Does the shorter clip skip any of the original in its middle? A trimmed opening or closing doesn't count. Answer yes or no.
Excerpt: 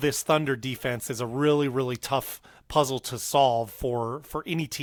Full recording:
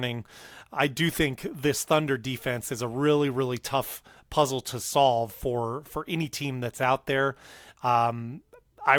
no